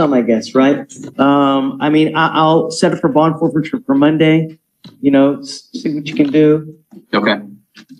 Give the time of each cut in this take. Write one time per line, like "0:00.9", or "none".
none